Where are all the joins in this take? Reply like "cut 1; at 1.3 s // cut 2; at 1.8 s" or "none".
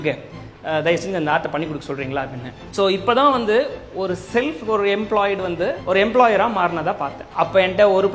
cut 1; at 2.6 s // cut 2; at 5.8 s // cut 3; at 7.2 s